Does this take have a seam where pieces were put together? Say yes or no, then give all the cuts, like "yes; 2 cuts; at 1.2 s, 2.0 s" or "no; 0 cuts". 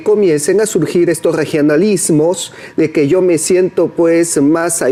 no; 0 cuts